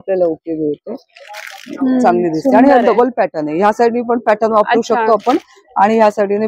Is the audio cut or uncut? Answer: uncut